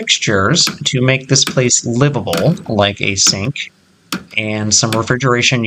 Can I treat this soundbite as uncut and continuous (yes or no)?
yes